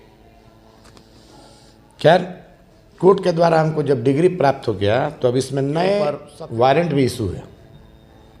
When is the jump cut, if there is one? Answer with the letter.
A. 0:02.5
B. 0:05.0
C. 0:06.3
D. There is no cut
C